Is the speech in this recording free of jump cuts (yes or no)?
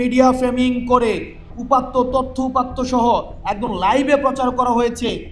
yes